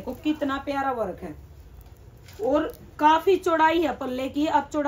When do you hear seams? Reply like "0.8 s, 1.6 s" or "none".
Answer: none